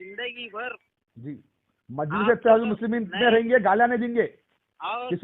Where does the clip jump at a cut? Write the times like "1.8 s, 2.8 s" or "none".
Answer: none